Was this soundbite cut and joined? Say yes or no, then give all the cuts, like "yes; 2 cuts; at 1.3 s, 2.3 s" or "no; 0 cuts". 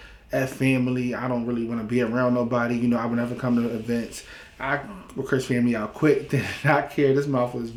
no; 0 cuts